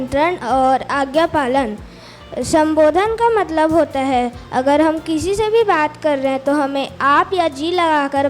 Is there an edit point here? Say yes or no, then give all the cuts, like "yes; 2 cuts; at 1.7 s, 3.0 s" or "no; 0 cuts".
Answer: no; 0 cuts